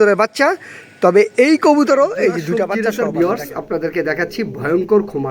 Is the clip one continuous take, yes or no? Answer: no